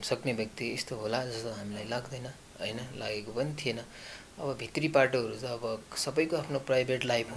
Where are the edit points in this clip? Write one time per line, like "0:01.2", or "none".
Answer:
none